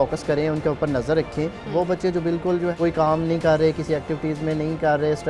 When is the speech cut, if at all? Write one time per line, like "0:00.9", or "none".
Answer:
0:01.6
0:02.7